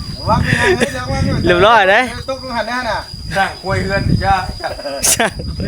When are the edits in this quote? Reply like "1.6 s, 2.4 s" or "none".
none